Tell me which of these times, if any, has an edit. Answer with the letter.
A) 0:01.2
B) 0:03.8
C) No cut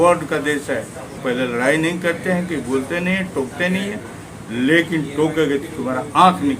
A